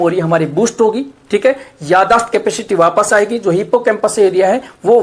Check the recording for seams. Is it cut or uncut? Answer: uncut